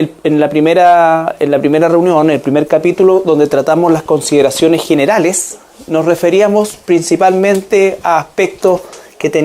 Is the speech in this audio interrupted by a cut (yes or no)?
yes